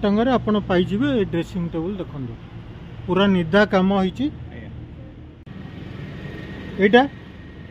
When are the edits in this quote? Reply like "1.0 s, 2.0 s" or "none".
5.5 s